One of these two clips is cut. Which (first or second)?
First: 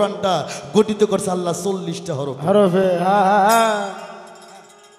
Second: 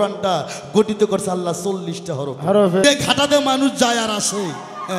second